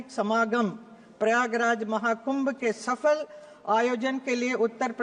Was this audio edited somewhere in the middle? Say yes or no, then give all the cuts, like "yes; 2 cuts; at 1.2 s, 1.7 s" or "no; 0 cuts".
no; 0 cuts